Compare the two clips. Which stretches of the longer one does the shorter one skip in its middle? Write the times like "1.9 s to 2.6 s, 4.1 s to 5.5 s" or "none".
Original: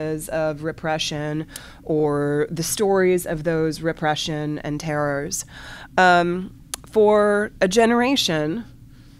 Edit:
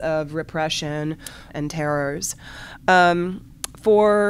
1.8 s to 4.6 s